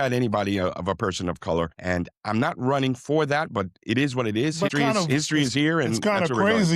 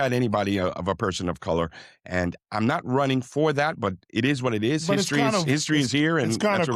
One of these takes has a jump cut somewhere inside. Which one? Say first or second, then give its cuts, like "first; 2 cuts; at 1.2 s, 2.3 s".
first; 2 cuts; at 1.8 s, 4.7 s